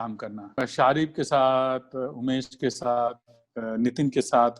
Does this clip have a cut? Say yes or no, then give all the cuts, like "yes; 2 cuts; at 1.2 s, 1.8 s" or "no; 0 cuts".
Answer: no; 0 cuts